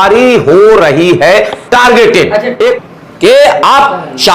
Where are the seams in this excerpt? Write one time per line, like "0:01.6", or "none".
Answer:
0:02.8